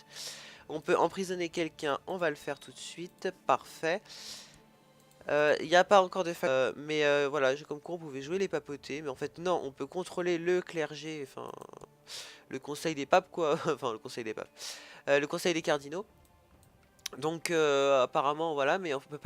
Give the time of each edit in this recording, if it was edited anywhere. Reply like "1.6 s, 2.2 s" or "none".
none